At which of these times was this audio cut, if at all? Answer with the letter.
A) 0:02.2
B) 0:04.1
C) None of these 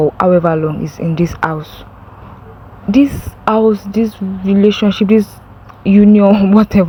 C